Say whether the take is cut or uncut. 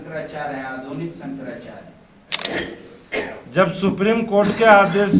cut